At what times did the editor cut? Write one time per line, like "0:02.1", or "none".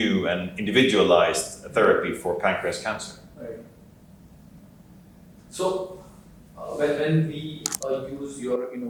none